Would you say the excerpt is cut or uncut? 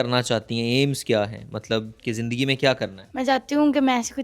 cut